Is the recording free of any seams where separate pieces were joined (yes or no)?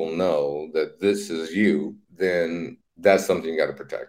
no